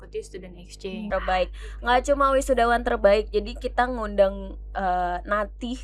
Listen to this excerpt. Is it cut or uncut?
cut